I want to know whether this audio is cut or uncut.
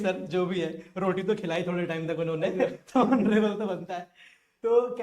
uncut